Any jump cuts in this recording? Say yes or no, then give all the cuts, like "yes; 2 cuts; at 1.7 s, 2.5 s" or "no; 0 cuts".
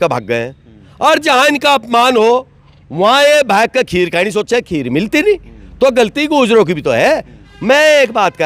no; 0 cuts